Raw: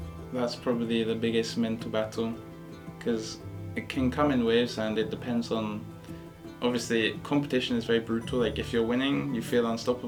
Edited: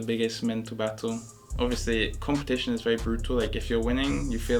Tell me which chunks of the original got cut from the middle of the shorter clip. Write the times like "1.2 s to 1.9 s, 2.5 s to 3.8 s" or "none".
2.5 s to 6.4 s